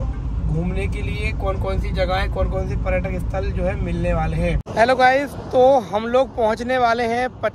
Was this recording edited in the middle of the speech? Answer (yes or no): yes